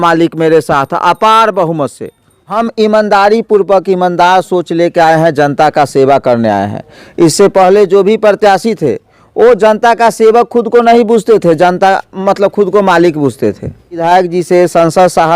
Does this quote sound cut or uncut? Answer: cut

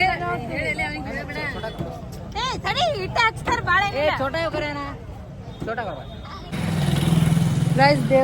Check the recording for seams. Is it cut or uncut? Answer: cut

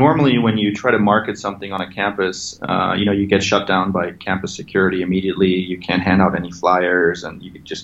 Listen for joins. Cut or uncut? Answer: uncut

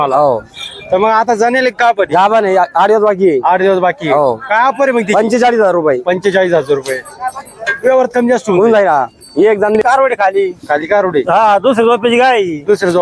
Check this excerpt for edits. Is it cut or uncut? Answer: cut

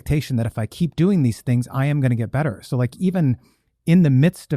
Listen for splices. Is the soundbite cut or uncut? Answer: uncut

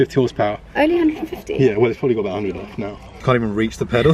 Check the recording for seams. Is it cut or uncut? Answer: cut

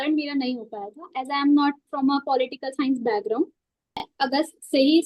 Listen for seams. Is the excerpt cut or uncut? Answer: cut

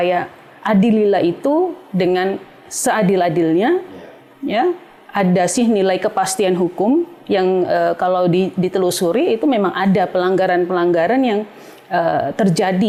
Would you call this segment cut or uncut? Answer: uncut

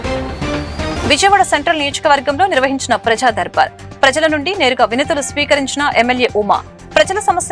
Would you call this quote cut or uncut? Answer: cut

